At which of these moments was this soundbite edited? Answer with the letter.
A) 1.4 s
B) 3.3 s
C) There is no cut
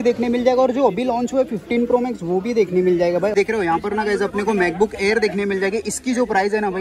B